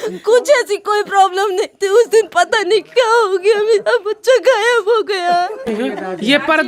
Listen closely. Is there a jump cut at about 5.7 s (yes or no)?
yes